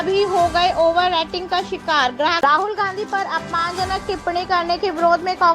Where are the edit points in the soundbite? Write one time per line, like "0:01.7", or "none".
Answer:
0:02.4